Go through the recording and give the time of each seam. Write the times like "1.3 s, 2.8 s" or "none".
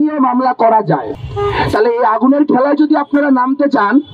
1.2 s